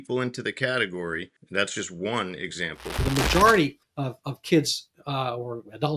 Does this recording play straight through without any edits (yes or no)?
no